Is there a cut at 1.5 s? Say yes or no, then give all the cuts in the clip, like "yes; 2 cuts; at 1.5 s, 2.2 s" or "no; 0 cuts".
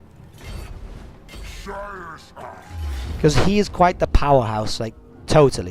no; 1 cut; at 4.0 s